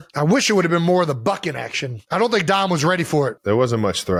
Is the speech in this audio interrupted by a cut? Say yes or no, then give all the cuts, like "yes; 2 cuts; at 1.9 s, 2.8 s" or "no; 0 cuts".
no; 0 cuts